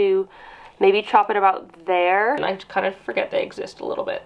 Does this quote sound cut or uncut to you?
cut